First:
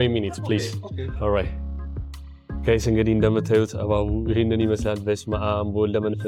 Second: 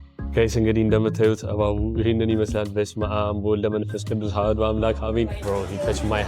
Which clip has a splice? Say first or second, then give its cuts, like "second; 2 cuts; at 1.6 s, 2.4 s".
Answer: second; 1 cut; at 5.4 s